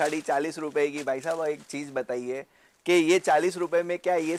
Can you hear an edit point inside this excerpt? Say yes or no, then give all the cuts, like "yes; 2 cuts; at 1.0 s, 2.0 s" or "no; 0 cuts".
no; 0 cuts